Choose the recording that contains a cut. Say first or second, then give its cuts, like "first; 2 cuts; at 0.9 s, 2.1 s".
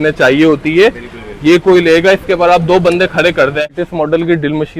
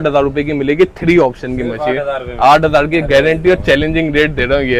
first; 1 cut; at 3.8 s